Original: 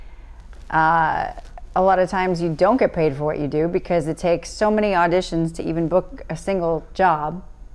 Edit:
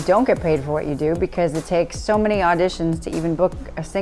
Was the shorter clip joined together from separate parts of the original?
no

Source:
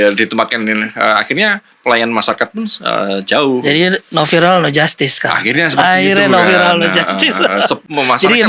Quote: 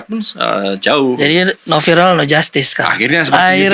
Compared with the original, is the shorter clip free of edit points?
yes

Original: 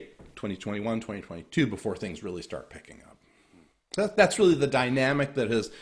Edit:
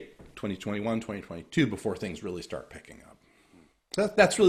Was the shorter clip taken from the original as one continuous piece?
yes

